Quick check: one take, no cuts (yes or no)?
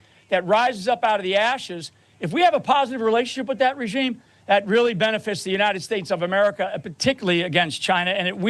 yes